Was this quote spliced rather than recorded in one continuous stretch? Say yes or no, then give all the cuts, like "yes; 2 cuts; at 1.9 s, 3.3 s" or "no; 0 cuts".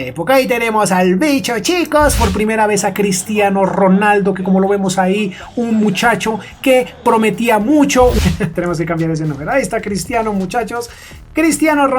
yes; 2 cuts; at 2.2 s, 8.2 s